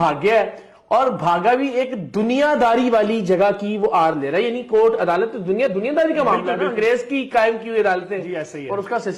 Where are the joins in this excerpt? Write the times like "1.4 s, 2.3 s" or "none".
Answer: none